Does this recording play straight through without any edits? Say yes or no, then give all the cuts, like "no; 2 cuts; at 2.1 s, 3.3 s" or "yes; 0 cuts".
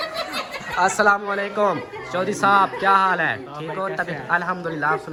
yes; 0 cuts